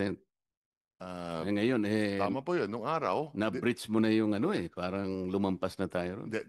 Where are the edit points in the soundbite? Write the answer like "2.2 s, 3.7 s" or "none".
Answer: none

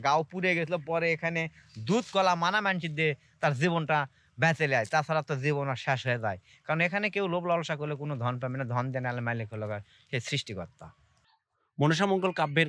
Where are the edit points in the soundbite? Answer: 11.0 s

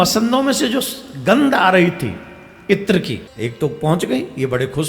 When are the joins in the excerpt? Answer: 3.3 s

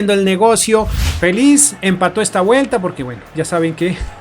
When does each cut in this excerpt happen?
0.9 s

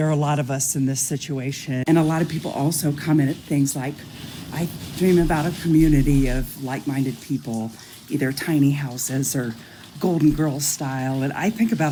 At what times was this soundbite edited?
none

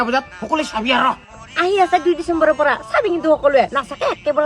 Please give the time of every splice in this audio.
1.2 s

